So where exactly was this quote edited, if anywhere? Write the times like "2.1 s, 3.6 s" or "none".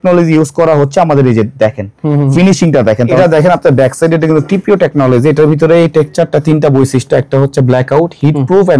3.2 s